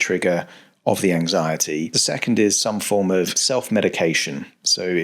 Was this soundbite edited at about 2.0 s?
yes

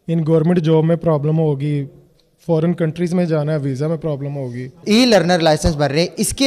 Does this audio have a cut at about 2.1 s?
no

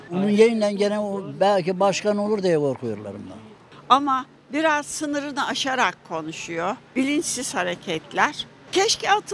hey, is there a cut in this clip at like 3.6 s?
yes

